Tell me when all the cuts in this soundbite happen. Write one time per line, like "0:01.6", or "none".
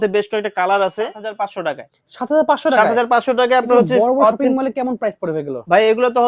0:01.4